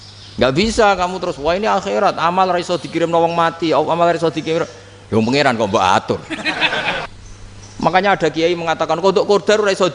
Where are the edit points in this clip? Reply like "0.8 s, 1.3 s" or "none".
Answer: 7.1 s